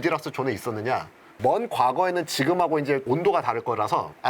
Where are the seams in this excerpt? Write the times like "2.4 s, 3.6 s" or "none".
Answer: 1.3 s